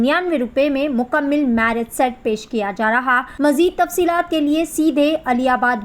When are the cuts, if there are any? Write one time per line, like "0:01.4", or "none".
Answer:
0:03.3